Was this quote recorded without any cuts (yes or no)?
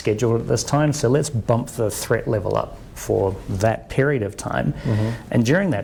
yes